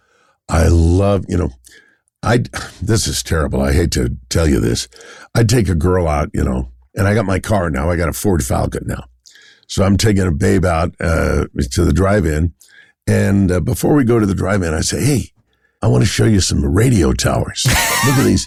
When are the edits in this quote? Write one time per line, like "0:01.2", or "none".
none